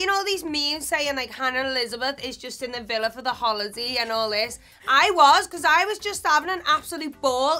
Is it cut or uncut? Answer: uncut